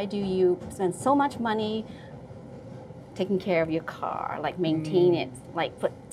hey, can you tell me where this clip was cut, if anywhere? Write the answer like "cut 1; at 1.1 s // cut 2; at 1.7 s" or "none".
none